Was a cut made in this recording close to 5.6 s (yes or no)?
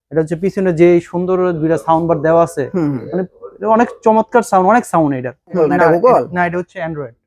yes